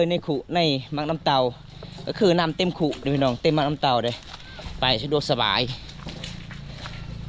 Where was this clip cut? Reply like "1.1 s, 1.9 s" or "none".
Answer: none